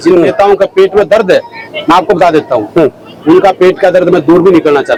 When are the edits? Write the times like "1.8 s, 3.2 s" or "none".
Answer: none

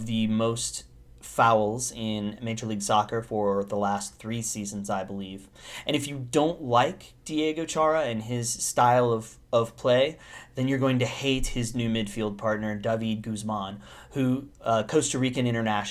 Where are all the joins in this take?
3.5 s

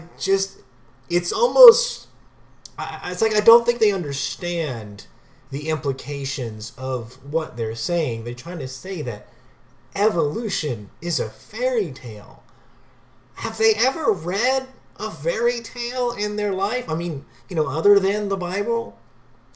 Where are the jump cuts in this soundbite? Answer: none

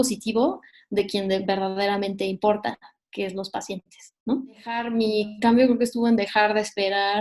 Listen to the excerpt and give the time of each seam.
4.9 s

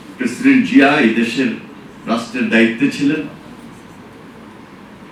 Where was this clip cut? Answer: none

